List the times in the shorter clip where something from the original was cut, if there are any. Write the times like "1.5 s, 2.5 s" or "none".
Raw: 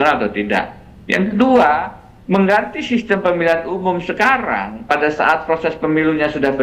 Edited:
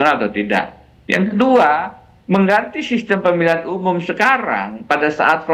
none